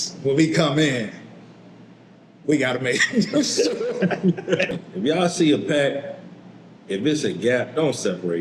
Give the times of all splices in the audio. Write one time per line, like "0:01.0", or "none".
0:04.7

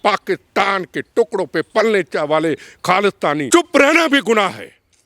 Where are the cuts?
0:03.5

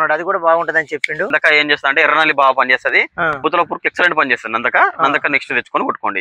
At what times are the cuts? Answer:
0:01.3
0:03.4

